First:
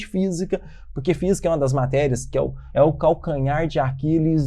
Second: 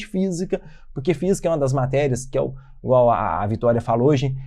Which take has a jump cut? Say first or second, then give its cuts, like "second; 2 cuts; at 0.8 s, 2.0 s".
first; 1 cut; at 2.6 s